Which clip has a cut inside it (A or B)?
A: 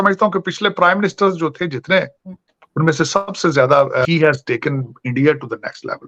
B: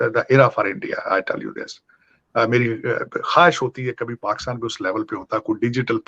A